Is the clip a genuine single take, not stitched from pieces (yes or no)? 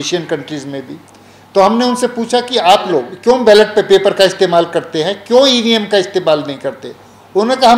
no